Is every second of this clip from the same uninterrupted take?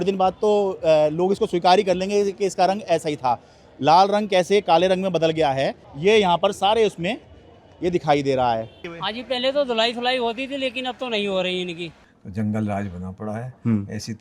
no; 3 cuts; at 5.8 s, 8.8 s, 11.9 s

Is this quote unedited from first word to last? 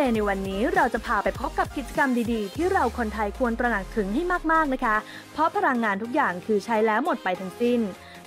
yes; 0 cuts

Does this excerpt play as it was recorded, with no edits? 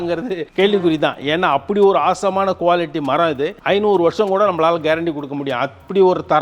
yes; 0 cuts

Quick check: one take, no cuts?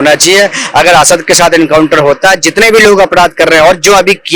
yes; 0 cuts

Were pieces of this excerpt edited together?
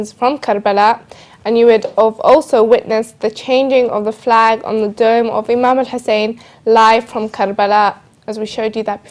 no; 0 cuts

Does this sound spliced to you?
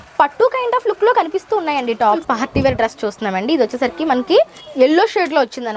yes; 2 cuts; at 2.2 s, 4.6 s

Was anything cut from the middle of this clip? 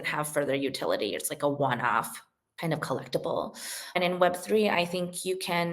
yes; 1 cut; at 4.0 s

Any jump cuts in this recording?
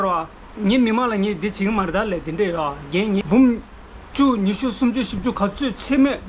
yes; 1 cut; at 3.2 s

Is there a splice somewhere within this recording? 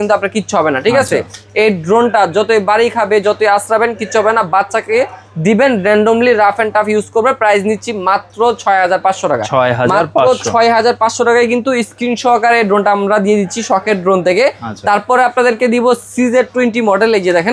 no; 0 cuts

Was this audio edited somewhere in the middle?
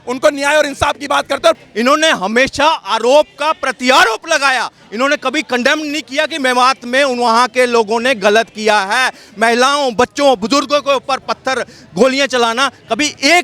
yes; 1 cut; at 1.6 s

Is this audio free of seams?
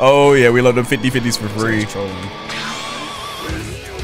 no; 1 cut; at 1.9 s

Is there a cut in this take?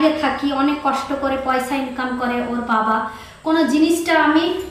no; 0 cuts

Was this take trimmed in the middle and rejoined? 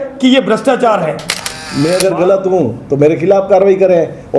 yes; 1 cut; at 1.6 s

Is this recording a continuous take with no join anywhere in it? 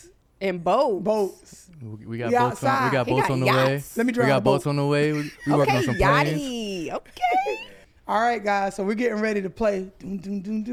yes; 0 cuts

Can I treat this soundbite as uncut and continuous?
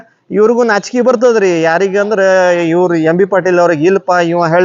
yes; 0 cuts

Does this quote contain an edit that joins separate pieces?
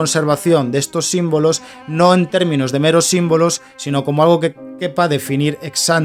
no; 0 cuts

